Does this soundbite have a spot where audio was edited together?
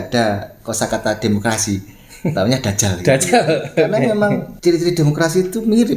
yes; 1 cut; at 4.5 s

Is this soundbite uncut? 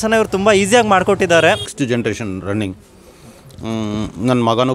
no; 1 cut; at 1.7 s

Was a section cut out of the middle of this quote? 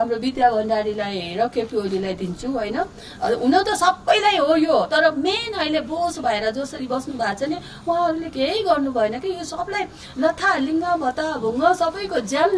no; 0 cuts

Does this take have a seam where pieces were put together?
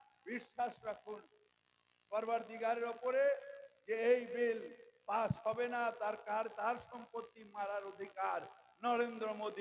no; 0 cuts

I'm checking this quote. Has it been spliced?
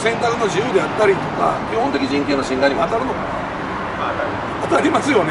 no; 0 cuts

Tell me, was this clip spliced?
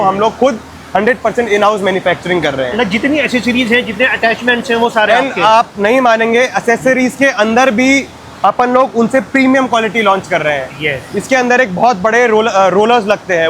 no; 0 cuts

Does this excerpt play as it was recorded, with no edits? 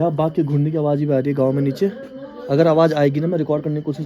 yes; 0 cuts

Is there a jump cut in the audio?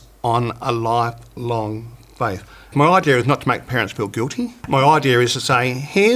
yes; 2 cuts; at 2.7 s, 4.6 s

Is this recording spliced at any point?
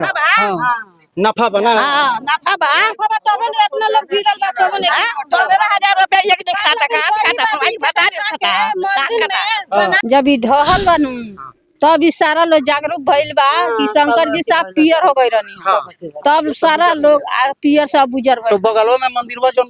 yes; 1 cut; at 10.0 s

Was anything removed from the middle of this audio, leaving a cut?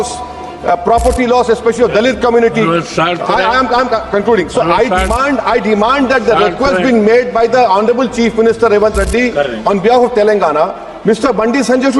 no; 0 cuts

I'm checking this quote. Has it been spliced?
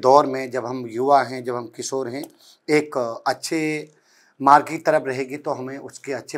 no; 0 cuts

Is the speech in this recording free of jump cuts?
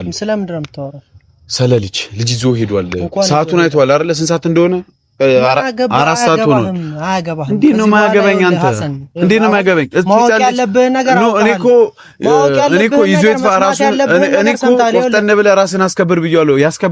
yes; 0 cuts

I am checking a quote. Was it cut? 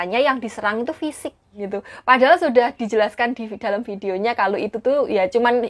yes; 1 cut; at 1.6 s

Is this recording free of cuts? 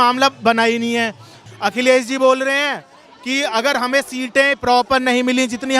yes; 0 cuts

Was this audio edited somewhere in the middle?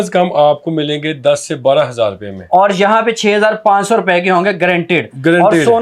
no; 0 cuts

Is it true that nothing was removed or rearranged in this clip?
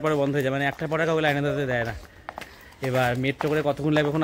yes; 0 cuts

